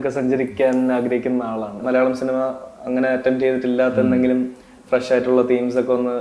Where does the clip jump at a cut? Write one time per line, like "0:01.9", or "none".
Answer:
0:01.8